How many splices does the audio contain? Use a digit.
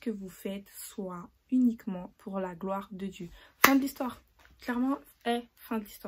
0